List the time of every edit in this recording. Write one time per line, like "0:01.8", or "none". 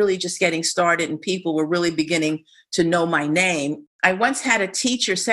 0:03.9